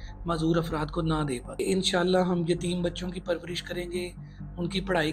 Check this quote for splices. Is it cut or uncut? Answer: cut